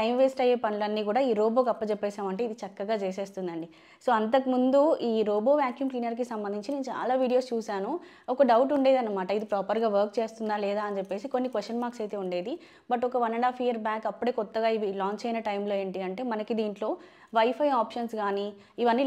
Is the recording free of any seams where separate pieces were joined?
yes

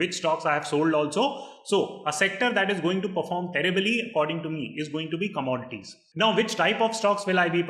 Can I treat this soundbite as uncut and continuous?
no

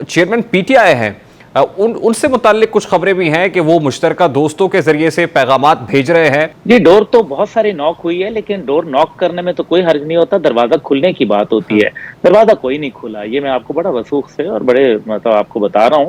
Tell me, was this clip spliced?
yes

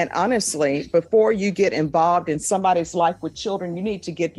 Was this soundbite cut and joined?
no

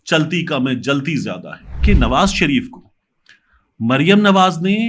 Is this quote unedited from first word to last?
no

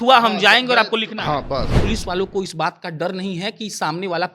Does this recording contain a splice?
yes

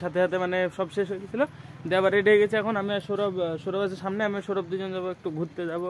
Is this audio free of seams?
yes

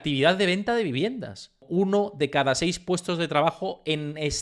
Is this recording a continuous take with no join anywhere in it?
no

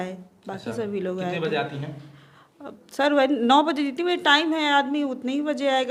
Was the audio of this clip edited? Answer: no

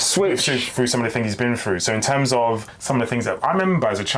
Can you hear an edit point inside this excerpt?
yes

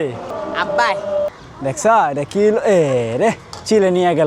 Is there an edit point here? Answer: yes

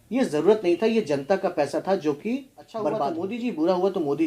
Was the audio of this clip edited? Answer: yes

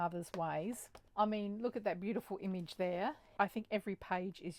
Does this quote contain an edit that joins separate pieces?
yes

